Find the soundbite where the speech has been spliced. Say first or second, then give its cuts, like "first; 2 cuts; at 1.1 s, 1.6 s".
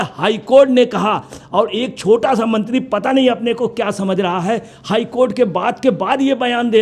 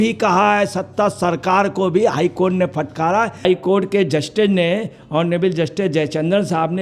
second; 1 cut; at 3.4 s